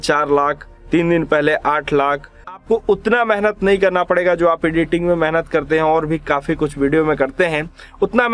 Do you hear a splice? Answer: yes; 1 cut; at 2.6 s

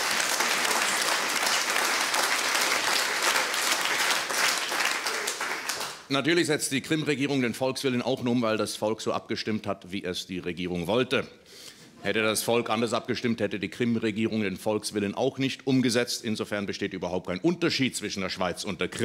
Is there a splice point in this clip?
yes; 1 cut; at 5.7 s

